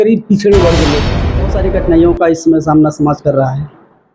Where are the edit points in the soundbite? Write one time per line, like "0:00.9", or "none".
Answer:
0:01.4